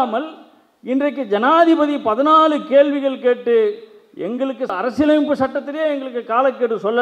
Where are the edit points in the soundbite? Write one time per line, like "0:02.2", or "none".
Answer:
none